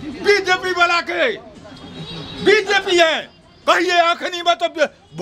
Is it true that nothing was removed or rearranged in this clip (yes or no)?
yes